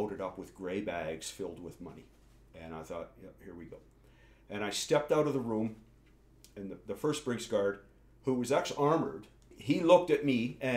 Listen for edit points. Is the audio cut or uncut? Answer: cut